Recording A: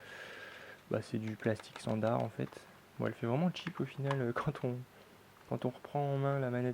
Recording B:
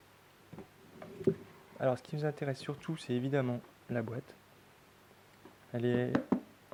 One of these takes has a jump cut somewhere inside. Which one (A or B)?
A